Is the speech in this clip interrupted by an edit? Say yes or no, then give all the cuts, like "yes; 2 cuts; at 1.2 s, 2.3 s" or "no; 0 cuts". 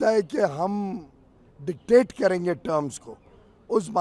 no; 0 cuts